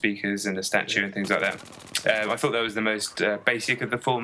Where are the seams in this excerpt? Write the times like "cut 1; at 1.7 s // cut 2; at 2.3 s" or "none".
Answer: cut 1; at 1.4 s